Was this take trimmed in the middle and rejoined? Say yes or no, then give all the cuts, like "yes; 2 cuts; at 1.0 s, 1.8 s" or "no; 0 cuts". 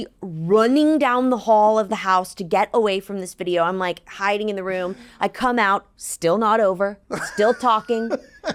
no; 0 cuts